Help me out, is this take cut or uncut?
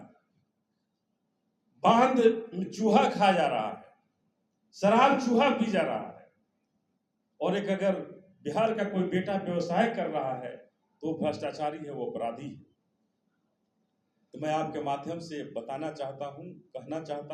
uncut